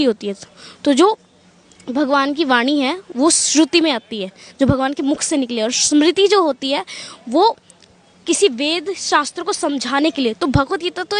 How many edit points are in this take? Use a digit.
0